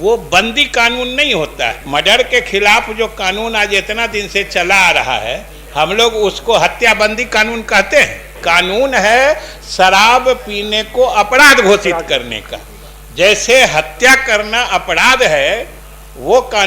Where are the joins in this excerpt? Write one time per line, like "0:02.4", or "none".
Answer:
0:01.8
0:08.3